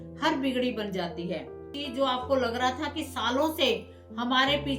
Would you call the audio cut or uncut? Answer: cut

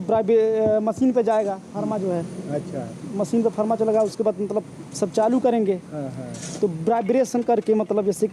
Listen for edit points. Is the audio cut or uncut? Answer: uncut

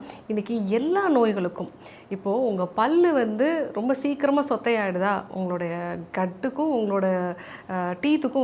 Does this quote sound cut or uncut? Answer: uncut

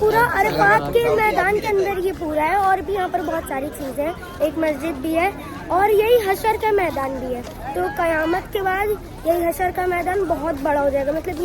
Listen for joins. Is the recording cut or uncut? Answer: uncut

